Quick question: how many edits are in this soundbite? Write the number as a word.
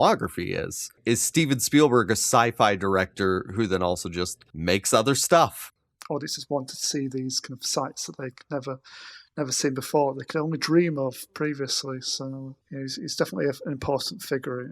four